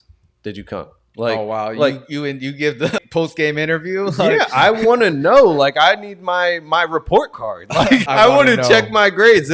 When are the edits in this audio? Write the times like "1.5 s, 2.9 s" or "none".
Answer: 3.0 s, 8.1 s